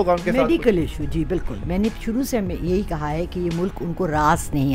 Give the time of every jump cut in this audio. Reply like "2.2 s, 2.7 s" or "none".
none